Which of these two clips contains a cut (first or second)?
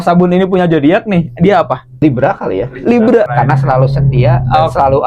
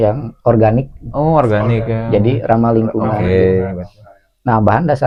first